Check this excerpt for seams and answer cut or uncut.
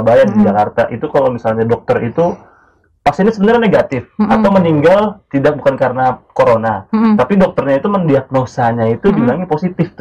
uncut